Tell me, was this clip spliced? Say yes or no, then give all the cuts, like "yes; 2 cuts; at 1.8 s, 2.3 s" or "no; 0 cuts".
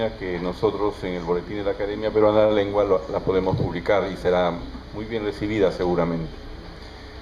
yes; 1 cut; at 4.4 s